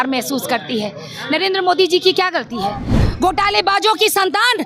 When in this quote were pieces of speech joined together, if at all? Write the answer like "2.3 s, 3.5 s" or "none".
3.0 s